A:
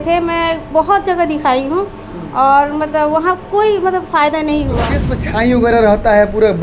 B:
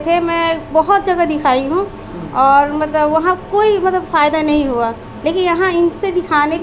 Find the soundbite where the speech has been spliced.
A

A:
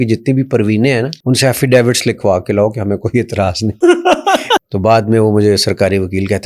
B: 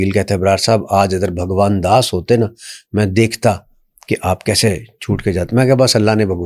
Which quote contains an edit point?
A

